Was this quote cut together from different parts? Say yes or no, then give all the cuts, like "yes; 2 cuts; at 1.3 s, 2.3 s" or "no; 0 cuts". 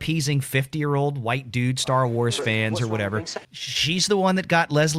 yes; 1 cut; at 3.4 s